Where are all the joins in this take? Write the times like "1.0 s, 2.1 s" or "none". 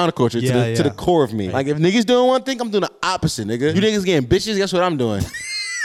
1.5 s, 3.7 s